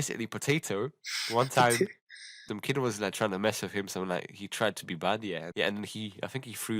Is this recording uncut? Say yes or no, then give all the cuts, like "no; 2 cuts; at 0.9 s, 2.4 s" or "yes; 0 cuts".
no; 2 cuts; at 2.4 s, 5.5 s